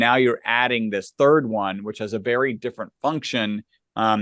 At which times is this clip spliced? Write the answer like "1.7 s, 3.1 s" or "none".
none

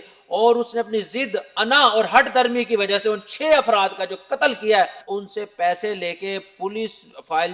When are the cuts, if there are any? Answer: 5.1 s

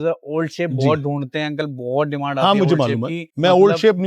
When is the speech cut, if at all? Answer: none

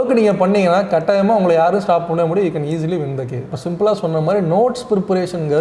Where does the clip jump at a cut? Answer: 3.5 s

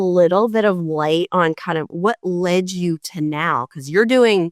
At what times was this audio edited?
none

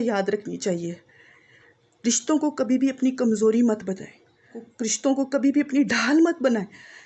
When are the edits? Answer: 4.6 s

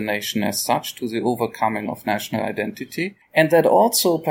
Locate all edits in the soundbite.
none

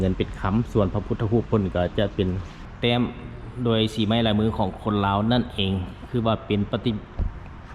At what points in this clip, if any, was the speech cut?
2.6 s

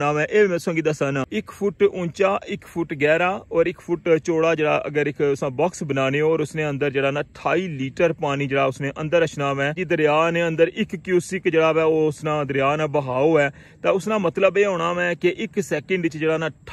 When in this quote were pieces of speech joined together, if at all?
1.4 s, 9.8 s

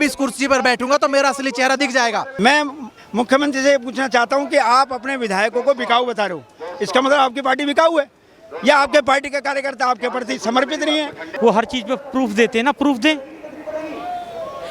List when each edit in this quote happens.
2.3 s, 11.3 s

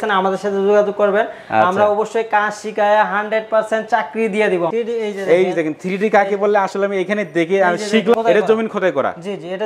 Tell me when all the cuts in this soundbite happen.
4.7 s, 8.1 s

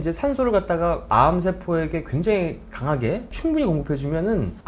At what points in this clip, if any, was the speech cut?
none

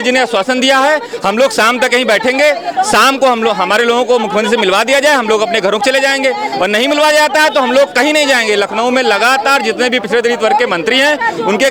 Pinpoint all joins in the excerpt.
none

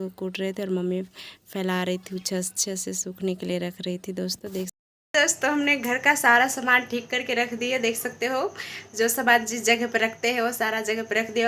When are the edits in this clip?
none

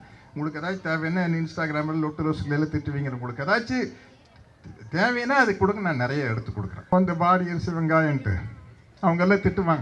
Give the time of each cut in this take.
6.9 s

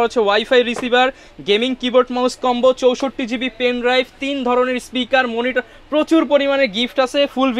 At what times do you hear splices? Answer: none

